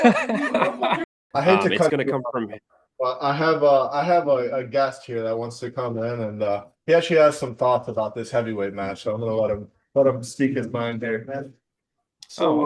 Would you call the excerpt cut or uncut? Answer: cut